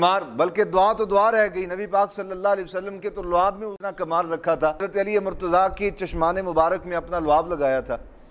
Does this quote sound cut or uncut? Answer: cut